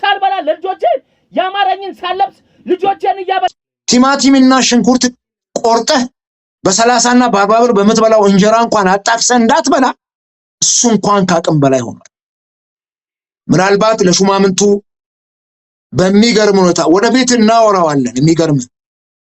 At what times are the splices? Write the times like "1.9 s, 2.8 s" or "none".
3.5 s